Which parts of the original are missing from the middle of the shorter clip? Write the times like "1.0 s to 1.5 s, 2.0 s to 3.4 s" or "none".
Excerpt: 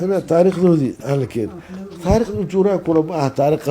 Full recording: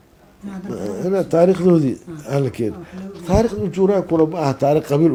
2.0 s to 2.2 s